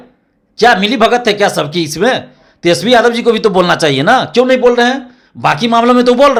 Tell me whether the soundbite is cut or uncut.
uncut